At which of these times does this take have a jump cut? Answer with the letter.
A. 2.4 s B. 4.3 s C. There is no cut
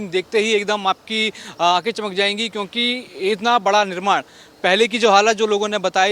C